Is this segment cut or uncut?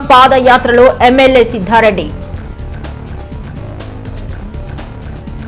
cut